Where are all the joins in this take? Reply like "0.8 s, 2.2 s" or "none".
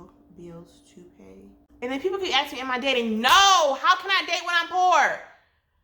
1.7 s